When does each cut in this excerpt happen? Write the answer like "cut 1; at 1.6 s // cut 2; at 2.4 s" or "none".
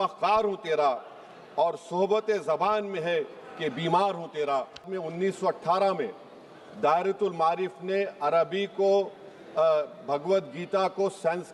cut 1; at 4.9 s